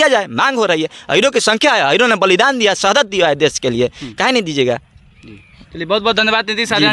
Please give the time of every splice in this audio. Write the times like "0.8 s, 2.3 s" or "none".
none